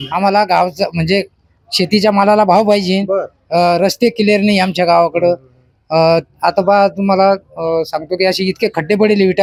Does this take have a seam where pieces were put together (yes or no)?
no